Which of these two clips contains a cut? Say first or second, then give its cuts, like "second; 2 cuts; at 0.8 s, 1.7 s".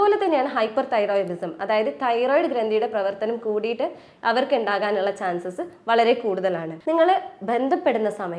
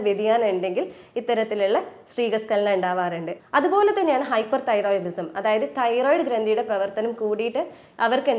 first; 1 cut; at 6.7 s